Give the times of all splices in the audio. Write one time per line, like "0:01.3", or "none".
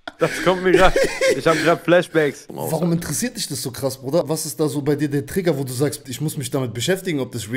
0:02.5
0:04.2
0:06.0